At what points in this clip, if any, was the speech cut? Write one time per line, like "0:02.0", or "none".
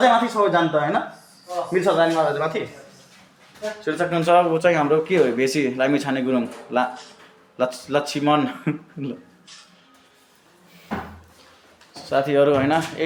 none